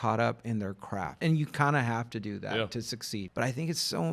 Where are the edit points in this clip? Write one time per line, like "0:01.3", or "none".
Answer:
0:01.2
0:03.3